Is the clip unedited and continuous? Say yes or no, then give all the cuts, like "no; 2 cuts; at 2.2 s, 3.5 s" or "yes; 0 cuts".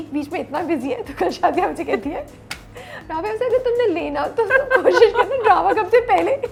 yes; 0 cuts